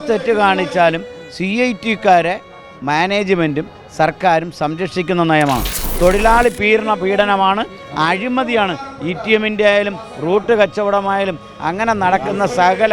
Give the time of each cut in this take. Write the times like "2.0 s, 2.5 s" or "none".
5.8 s